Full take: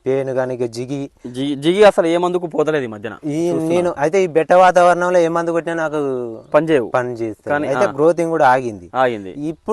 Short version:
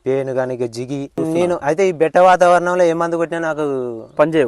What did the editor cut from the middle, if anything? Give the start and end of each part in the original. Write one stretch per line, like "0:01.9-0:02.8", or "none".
0:01.2-0:03.5